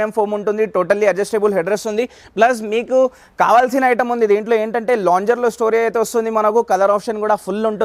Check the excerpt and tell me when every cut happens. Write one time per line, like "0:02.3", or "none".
none